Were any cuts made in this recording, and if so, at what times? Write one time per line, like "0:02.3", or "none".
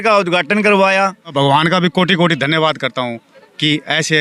0:01.3